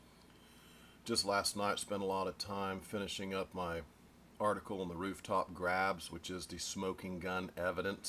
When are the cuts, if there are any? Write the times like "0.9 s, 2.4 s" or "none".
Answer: 5.5 s